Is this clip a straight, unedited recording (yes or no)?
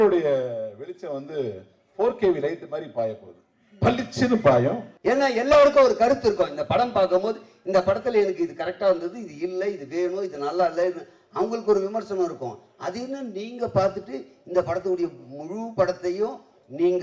no